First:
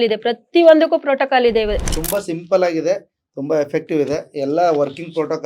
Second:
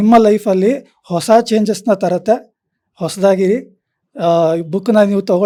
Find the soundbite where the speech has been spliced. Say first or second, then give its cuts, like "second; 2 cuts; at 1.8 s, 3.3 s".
first; 1 cut; at 1.9 s